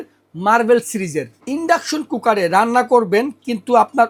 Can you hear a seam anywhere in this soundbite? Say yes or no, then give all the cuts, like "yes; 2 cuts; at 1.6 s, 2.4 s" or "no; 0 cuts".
no; 0 cuts